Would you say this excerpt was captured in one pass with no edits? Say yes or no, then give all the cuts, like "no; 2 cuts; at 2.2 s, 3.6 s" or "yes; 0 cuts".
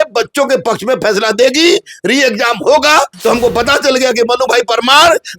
no; 1 cut; at 3.1 s